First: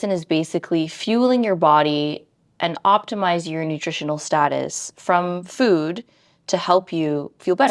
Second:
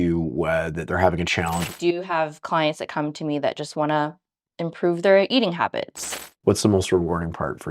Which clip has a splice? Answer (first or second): second